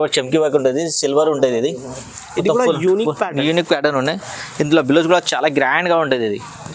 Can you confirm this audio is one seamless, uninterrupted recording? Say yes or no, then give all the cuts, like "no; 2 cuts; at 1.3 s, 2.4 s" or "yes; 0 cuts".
yes; 0 cuts